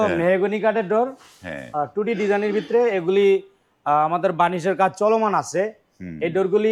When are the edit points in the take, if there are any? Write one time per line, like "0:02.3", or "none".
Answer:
none